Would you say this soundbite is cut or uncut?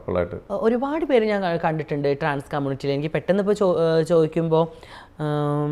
uncut